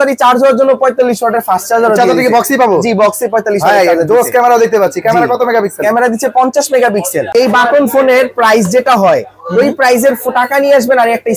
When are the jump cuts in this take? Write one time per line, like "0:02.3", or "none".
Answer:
0:07.3